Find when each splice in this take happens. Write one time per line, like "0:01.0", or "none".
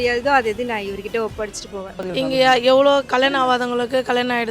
0:02.0